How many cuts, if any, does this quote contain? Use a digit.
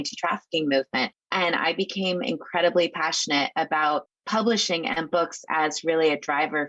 1